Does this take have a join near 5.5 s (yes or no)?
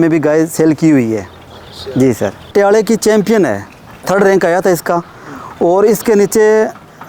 no